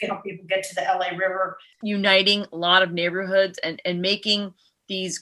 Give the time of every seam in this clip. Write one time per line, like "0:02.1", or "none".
0:01.7